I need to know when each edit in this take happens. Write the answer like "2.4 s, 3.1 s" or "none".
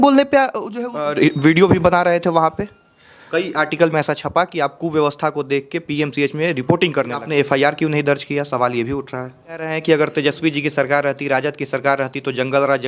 1.1 s, 7.2 s, 9.7 s